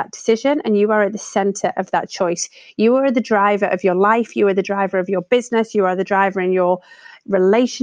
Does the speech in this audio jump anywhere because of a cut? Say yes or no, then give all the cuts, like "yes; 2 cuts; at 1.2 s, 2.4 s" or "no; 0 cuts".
no; 0 cuts